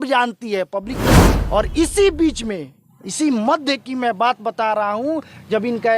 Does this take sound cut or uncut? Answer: cut